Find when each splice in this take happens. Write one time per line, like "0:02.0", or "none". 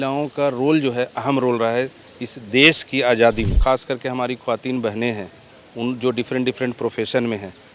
0:03.6